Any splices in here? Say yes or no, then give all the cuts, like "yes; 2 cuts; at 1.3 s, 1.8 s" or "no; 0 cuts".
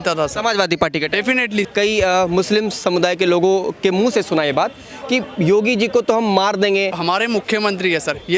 yes; 2 cuts; at 1.7 s, 6.9 s